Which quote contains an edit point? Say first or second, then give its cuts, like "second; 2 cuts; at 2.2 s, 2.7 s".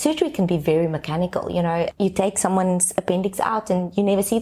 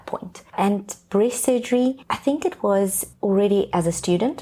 second; 2 cuts; at 2.1 s, 3.1 s